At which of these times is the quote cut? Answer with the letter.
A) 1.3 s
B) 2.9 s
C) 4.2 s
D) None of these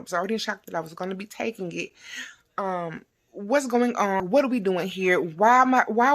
C